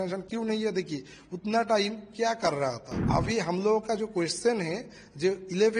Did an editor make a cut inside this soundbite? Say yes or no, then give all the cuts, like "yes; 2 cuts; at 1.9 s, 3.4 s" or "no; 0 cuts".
yes; 1 cut; at 3.1 s